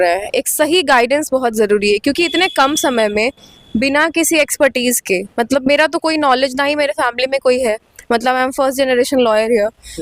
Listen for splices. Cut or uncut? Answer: uncut